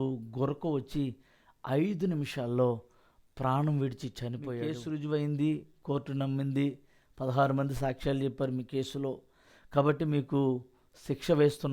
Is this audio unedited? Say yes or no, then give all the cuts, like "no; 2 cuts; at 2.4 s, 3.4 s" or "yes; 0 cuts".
no; 1 cut; at 4.5 s